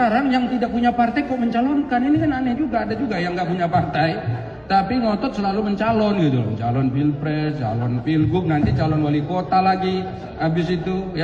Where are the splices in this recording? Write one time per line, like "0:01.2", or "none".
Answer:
none